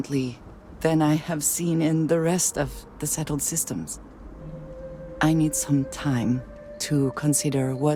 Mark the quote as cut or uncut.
uncut